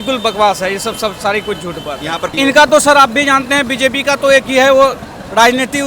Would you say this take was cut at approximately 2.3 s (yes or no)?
yes